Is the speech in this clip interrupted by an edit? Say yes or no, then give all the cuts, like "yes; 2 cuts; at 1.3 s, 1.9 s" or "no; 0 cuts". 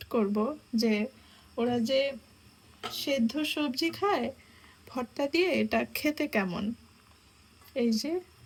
no; 0 cuts